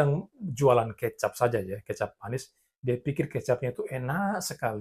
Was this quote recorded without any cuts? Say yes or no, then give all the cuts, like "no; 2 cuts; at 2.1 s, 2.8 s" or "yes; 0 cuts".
yes; 0 cuts